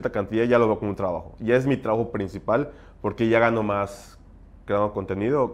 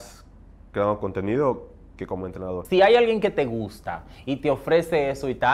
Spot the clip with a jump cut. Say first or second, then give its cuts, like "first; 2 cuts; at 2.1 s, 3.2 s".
second; 1 cut; at 2.6 s